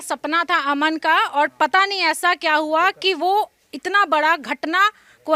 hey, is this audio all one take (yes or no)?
yes